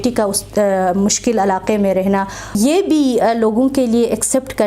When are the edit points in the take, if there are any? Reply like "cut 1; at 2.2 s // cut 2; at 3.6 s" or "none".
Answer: cut 1; at 2.6 s